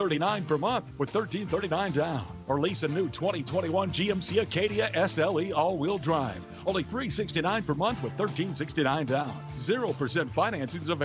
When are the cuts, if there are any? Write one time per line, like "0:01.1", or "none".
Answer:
none